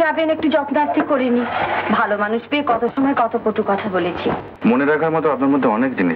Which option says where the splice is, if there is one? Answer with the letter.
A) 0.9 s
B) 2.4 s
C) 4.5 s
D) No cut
C